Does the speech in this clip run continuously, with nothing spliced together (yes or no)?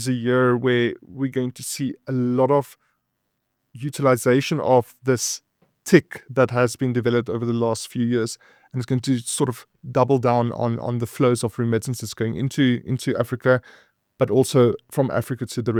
yes